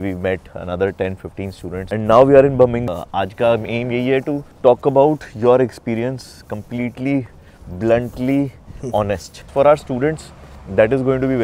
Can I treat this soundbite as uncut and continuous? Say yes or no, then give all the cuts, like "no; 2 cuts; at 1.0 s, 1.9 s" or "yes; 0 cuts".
no; 2 cuts; at 2.8 s, 9.5 s